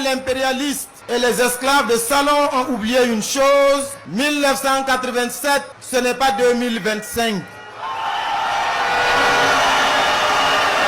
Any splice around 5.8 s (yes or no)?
yes